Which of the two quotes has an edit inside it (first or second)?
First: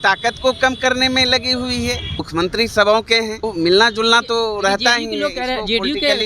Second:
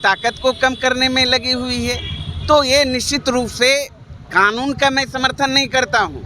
first